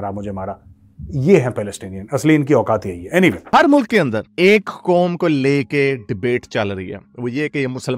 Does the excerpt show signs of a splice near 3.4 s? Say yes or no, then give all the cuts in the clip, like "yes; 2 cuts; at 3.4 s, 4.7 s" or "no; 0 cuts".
yes; 1 cut; at 3.4 s